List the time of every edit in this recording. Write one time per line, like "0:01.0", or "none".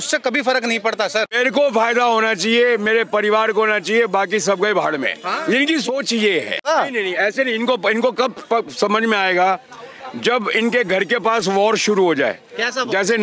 0:01.3
0:06.6